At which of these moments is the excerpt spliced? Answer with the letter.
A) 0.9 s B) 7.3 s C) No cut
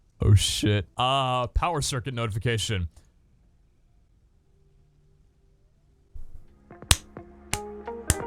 A